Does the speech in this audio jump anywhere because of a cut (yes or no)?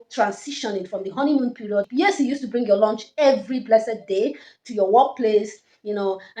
yes